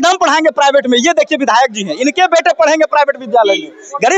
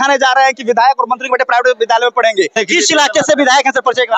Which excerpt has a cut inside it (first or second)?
second